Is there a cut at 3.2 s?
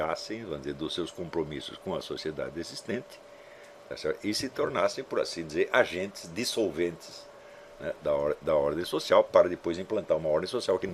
no; 0 cuts

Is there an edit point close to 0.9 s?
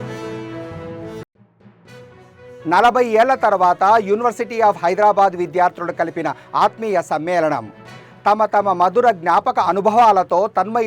yes; 1 cut; at 0.9 s

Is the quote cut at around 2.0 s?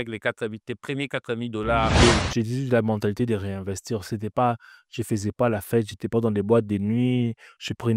yes; 1 cut; at 2.0 s

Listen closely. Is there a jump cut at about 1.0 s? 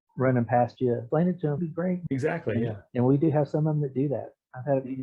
yes; 1 cut; at 1.0 s

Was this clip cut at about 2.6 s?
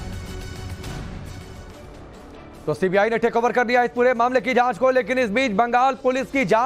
no; 1 cut; at 5.3 s

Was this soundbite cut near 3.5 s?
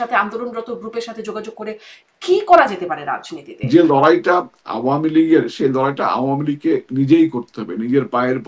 yes; 1 cut; at 3.5 s

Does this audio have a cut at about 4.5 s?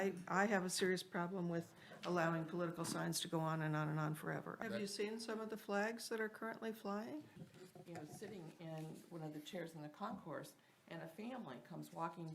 yes; 2 cuts; at 4.5 s, 7.5 s

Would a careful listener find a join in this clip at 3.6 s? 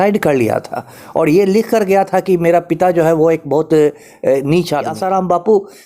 no; 1 cut; at 5.0 s

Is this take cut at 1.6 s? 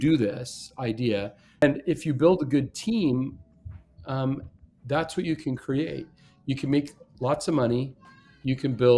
yes; 1 cut; at 1.6 s

